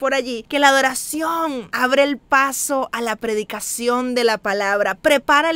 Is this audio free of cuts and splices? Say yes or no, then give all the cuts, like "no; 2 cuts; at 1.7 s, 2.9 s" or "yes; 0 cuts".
no; 1 cut; at 1.7 s